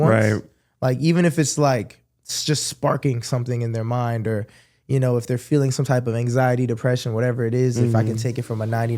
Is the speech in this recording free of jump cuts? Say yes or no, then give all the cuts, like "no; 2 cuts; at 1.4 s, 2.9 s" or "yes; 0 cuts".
yes; 0 cuts